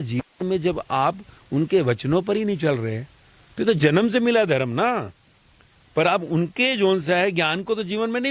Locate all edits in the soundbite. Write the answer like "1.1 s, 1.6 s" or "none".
none